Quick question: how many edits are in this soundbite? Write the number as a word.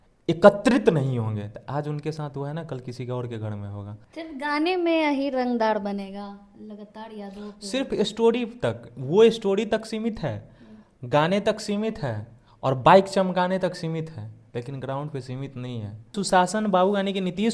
two